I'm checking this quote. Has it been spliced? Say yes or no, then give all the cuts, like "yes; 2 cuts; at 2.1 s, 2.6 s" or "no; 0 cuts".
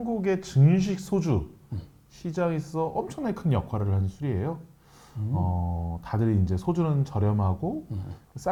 no; 0 cuts